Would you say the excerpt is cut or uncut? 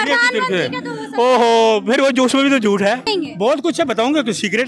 cut